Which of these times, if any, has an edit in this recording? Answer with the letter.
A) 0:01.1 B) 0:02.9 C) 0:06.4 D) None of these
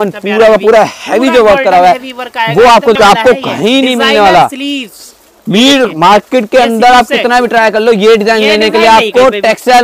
B